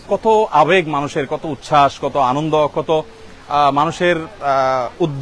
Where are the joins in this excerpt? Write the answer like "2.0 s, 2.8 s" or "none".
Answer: none